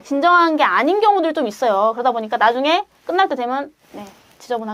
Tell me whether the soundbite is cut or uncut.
uncut